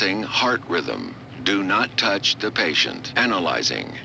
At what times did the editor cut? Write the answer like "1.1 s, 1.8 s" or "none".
2.9 s

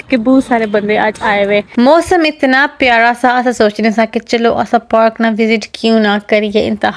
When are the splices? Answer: 1.7 s

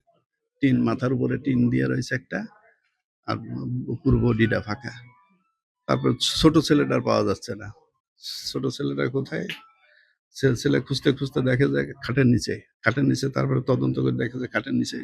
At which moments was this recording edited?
12.6 s

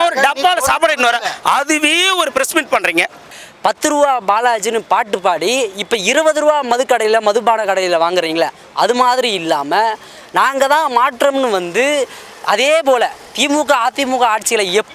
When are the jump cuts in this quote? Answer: 3.4 s

